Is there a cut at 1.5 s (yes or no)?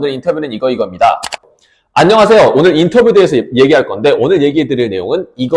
yes